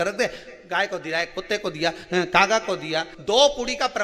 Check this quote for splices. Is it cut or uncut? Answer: cut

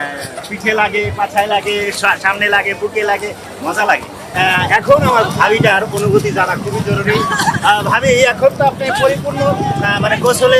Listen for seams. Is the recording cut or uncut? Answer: cut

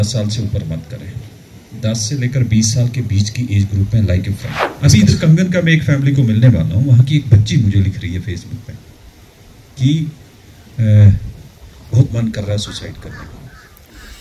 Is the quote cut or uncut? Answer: cut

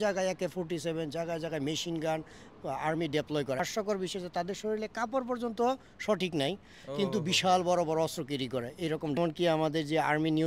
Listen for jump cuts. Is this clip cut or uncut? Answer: cut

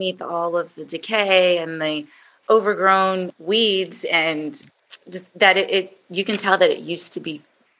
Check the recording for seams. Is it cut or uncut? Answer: uncut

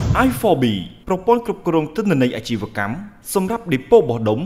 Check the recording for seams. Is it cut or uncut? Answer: uncut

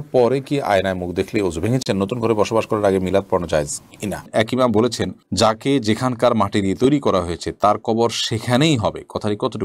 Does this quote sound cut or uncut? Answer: cut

